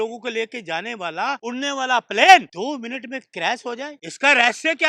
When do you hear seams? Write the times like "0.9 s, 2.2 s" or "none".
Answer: 1.4 s, 2.5 s, 4.0 s